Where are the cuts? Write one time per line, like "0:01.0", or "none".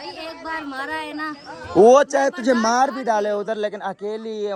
none